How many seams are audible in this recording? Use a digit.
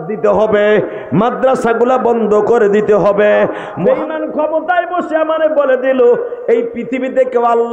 1